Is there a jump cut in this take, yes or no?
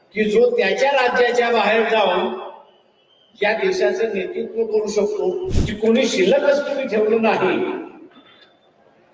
yes